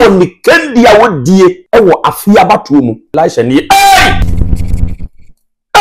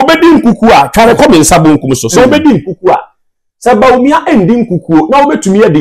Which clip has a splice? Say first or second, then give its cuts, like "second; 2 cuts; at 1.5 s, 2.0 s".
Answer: first; 3 cuts; at 1.6 s, 3.1 s, 4.2 s